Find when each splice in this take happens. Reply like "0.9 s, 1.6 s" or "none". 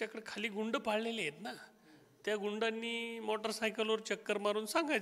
none

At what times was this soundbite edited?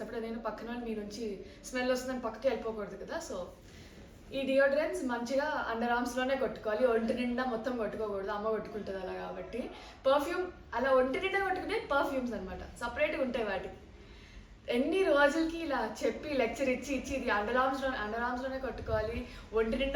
none

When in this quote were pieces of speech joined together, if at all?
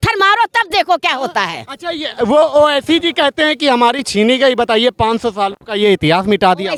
none

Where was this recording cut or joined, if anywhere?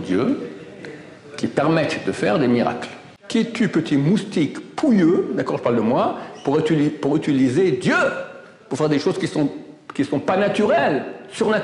3.1 s

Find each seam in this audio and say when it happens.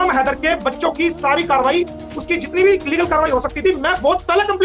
none

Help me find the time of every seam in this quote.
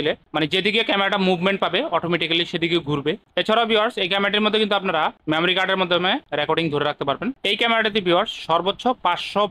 none

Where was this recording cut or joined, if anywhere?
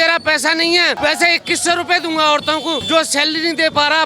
0.9 s, 2.8 s

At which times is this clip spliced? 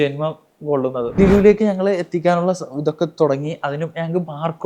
1.2 s

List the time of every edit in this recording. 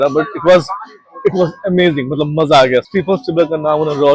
2.9 s

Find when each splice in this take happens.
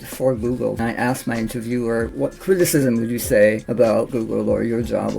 0.8 s, 2.1 s, 3.8 s

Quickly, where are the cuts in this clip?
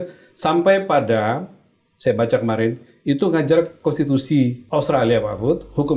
4.6 s

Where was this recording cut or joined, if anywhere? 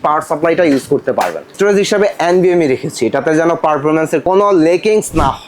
1.5 s, 4.2 s

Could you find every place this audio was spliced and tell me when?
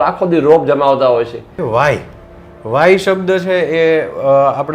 1.6 s

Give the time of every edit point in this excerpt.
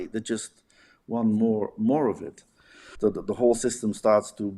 2.8 s

